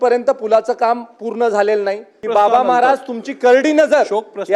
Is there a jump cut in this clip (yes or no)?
yes